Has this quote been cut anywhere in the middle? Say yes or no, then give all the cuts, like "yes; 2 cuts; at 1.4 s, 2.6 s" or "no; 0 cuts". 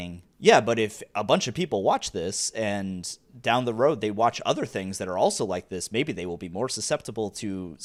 no; 0 cuts